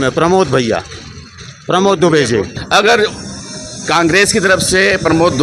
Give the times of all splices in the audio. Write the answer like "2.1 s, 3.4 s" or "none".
2.6 s